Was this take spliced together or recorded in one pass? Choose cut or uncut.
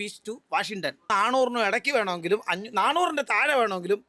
cut